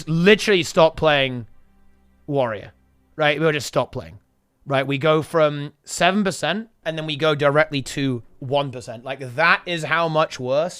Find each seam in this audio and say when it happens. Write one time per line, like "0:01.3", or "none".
0:06.8